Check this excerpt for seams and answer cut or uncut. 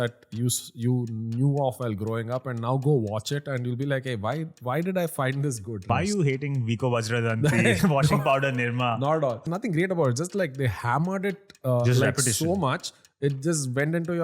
cut